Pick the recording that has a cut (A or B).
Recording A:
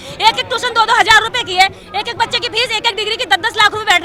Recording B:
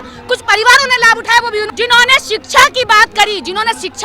B